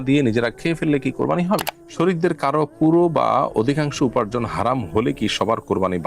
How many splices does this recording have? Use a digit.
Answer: 1